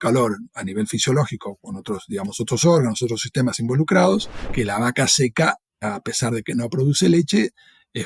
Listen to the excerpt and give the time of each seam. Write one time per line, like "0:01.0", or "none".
0:04.4